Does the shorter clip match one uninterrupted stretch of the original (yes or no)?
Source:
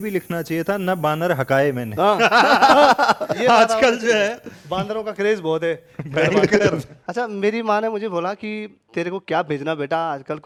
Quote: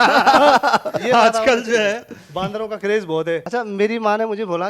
no